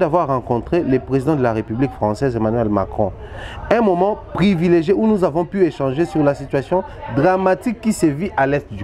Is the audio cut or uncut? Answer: uncut